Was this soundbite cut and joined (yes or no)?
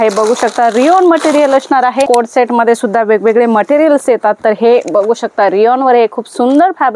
no